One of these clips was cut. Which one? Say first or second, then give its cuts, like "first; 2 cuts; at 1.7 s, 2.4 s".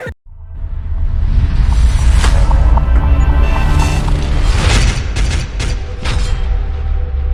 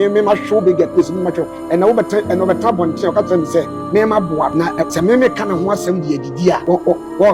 second; 2 cuts; at 4.8 s, 6.6 s